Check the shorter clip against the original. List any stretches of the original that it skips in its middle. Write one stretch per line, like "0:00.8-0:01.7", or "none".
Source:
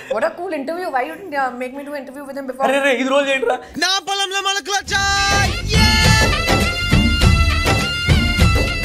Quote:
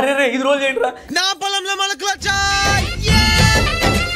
none